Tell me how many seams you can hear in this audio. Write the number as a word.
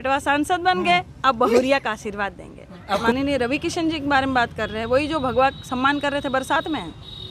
one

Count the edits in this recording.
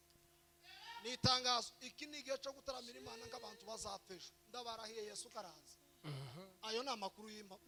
zero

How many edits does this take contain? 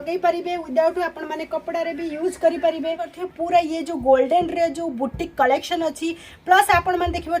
one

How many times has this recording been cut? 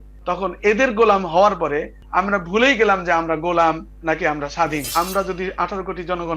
two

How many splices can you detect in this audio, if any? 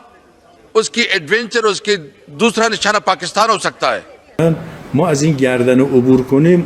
one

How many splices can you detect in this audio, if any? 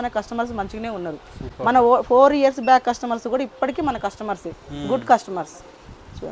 zero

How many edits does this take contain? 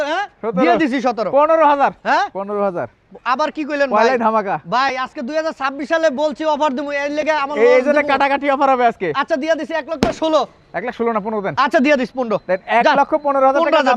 zero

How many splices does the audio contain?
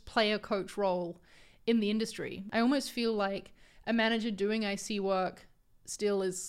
one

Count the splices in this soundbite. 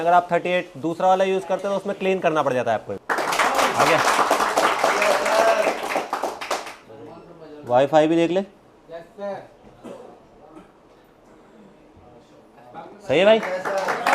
one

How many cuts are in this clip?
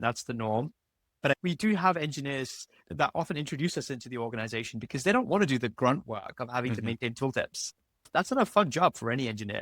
three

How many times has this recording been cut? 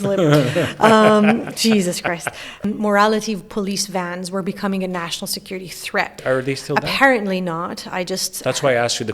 two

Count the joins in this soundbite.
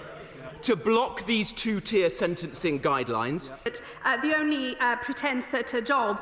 one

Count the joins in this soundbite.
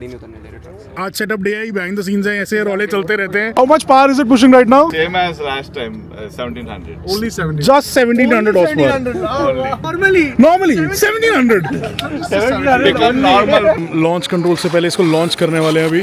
four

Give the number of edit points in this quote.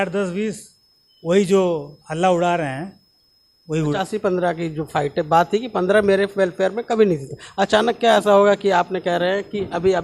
one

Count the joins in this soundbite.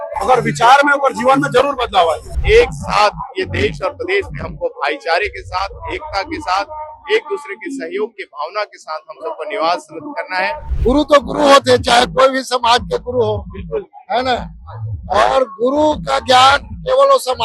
two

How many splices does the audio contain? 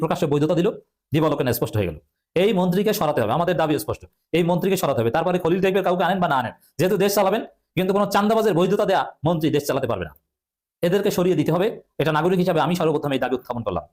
zero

